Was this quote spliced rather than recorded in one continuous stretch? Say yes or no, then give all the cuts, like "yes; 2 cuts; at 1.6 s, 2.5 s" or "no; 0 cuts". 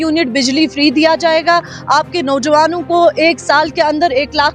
no; 0 cuts